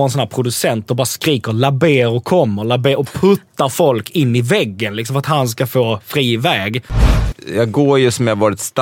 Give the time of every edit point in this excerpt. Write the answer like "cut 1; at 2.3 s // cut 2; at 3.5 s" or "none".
cut 1; at 7.2 s